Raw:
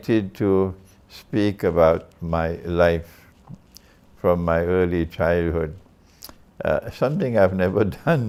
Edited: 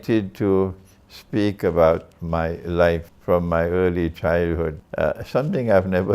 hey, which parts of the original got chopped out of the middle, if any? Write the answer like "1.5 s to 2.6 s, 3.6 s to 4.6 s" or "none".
3.1 s to 4.1 s, 5.8 s to 6.5 s